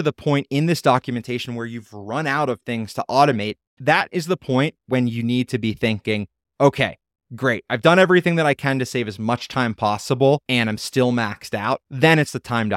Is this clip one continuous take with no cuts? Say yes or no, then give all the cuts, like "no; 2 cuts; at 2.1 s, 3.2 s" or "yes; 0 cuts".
no; 3 cuts; at 3.7 s, 10.4 s, 11.9 s